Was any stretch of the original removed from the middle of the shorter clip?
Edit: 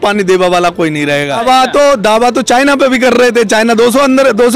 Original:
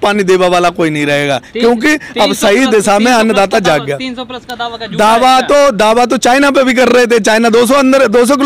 yes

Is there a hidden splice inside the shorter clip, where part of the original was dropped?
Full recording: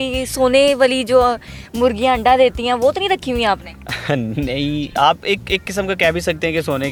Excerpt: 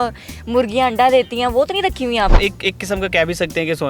yes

